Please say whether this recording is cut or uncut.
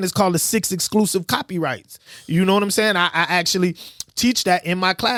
uncut